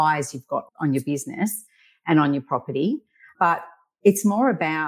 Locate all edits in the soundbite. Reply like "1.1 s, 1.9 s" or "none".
none